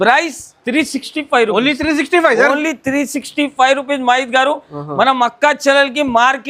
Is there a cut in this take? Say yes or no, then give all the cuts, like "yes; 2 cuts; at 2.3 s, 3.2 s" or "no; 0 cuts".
no; 0 cuts